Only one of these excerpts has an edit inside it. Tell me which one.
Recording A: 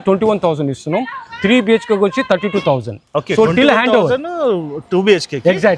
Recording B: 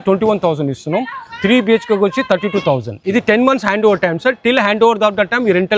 B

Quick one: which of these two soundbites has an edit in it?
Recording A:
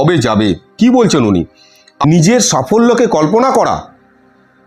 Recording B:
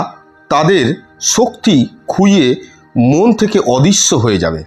A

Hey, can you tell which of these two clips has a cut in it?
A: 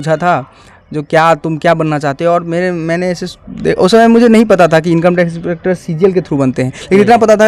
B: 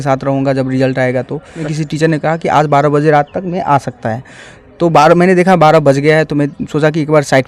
B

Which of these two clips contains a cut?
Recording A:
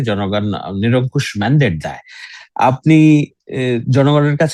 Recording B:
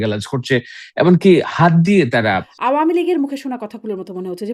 B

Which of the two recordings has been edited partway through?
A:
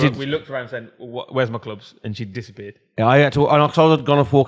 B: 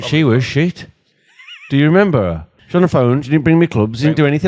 B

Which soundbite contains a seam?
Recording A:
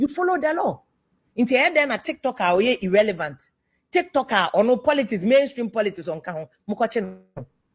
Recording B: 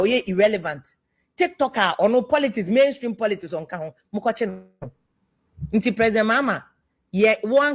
B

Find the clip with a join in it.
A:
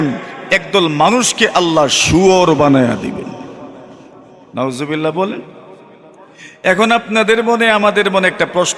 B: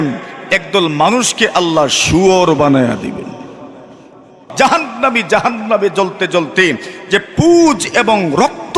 B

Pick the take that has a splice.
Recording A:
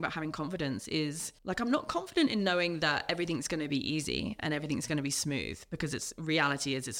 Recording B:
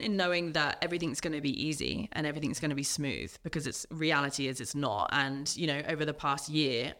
A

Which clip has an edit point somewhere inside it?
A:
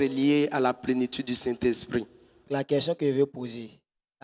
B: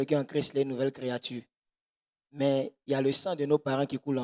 A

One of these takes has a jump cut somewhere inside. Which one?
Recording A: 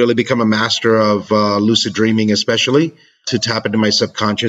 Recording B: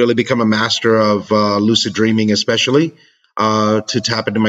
A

